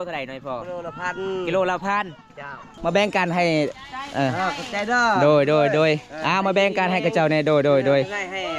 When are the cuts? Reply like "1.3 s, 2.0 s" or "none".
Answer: 2.8 s

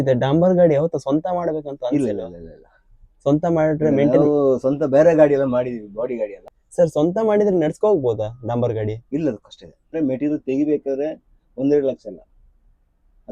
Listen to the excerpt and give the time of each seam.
6.4 s, 9.9 s

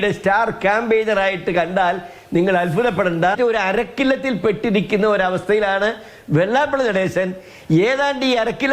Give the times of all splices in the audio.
3.4 s

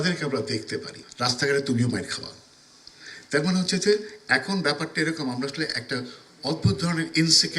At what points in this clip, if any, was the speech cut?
1.0 s

